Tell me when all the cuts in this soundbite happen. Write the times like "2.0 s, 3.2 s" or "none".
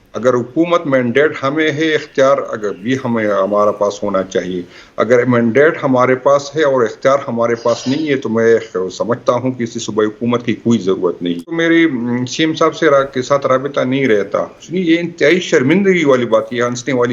11.5 s, 14.6 s